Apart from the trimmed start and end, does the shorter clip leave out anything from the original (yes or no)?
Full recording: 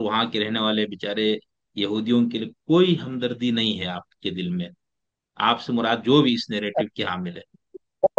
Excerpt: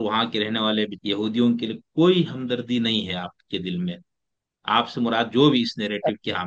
yes